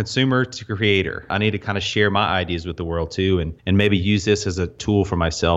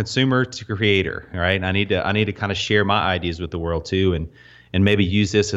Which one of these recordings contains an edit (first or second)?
first